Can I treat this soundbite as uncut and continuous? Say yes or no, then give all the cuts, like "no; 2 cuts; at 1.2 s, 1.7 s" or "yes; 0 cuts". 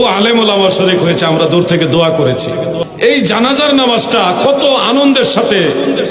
no; 1 cut; at 2.9 s